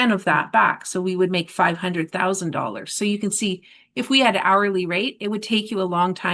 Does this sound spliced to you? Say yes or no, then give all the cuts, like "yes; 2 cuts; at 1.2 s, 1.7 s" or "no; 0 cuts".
no; 0 cuts